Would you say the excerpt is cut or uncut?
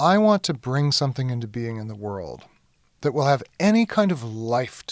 uncut